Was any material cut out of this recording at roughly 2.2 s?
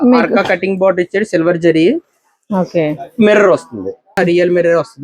no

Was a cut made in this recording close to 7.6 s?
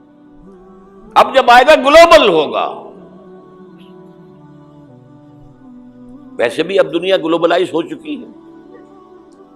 no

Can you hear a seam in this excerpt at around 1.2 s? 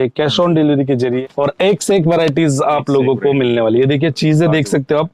yes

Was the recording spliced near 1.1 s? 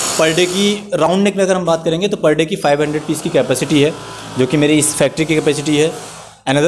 no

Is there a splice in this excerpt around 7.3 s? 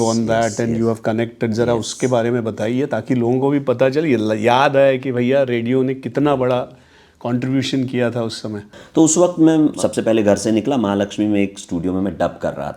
no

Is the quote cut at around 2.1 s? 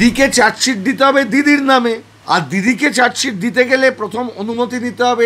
yes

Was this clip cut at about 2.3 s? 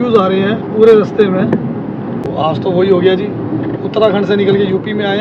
yes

